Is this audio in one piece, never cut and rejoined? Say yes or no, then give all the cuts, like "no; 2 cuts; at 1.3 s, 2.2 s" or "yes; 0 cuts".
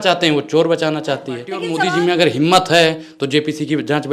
no; 1 cut; at 1.6 s